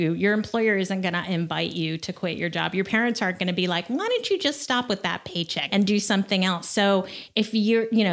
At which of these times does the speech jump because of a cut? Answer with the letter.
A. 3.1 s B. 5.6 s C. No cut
B